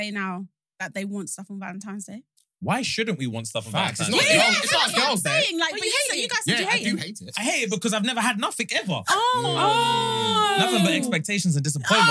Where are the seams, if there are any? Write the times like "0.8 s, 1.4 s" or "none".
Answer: none